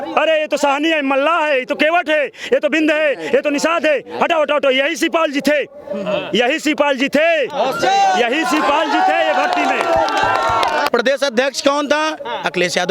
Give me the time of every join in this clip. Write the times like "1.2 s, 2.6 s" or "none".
10.9 s